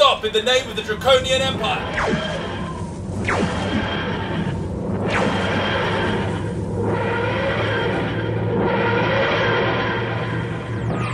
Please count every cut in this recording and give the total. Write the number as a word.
one